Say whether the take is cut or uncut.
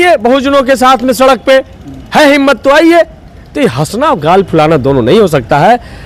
uncut